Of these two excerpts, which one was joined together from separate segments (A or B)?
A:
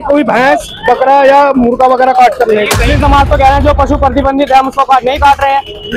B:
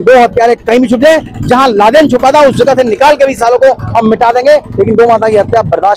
A